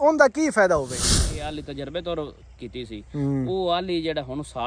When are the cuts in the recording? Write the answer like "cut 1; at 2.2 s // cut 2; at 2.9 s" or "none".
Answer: cut 1; at 1.1 s